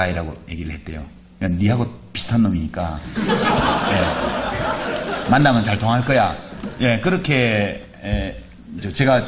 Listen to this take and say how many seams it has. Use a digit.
0